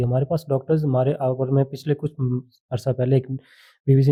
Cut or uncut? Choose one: uncut